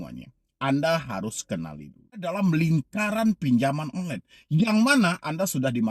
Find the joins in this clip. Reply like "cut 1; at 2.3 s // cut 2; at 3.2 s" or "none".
cut 1; at 2.4 s